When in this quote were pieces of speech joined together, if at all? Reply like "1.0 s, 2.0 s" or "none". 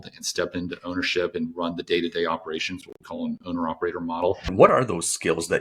4.5 s